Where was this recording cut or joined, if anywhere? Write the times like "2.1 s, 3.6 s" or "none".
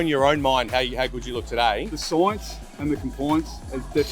1.9 s